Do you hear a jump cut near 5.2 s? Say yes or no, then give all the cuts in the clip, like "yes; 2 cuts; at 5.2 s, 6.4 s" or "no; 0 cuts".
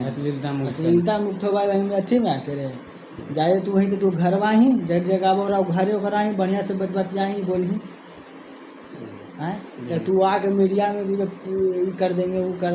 no; 0 cuts